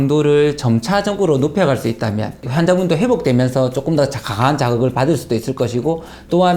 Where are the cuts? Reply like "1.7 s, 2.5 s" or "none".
2.4 s